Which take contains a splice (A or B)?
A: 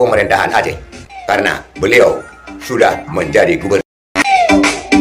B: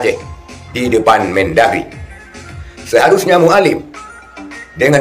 A